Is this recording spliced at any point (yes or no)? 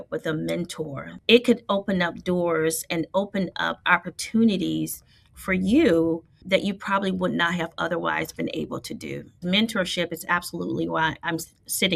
yes